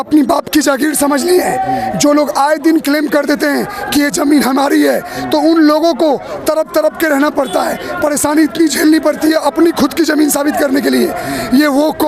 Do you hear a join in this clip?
no; 0 cuts

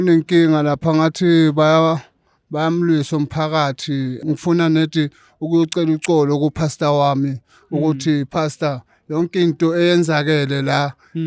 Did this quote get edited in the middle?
no; 0 cuts

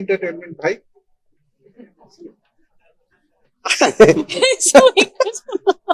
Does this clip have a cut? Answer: no; 0 cuts

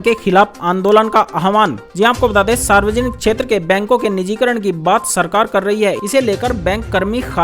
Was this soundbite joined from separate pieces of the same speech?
no; 0 cuts

